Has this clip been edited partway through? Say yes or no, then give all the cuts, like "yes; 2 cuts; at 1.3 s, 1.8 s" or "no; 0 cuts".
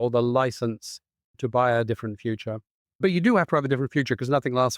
yes; 2 cuts; at 1.3 s, 3.0 s